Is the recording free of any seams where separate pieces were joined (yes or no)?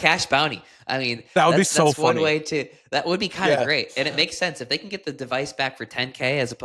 yes